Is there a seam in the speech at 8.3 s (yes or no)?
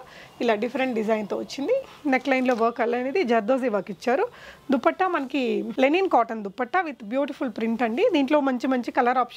no